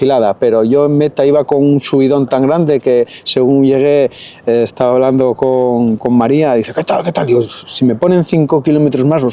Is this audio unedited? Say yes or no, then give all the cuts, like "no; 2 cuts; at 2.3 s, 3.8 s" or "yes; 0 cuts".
yes; 0 cuts